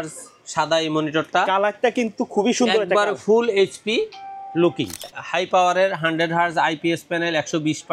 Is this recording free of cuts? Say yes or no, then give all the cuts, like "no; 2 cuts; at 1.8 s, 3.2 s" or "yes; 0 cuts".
no; 1 cut; at 5.2 s